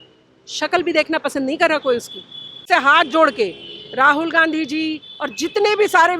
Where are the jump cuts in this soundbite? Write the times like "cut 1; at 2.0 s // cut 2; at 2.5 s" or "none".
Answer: cut 1; at 2.6 s